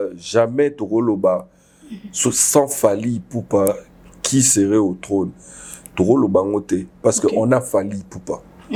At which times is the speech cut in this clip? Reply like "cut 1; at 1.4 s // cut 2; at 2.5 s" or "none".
none